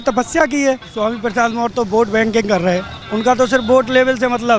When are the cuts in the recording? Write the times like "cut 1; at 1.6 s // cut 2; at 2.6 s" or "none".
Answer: cut 1; at 0.9 s // cut 2; at 3.0 s